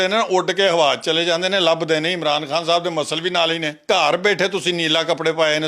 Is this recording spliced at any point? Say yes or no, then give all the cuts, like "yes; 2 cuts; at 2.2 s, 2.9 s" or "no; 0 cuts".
yes; 1 cut; at 3.8 s